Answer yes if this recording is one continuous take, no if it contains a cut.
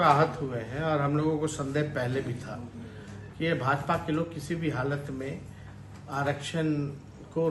yes